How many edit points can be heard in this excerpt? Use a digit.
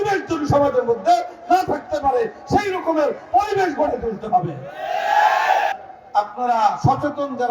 1